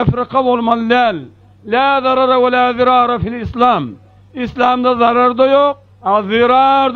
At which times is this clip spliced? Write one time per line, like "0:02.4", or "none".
0:05.9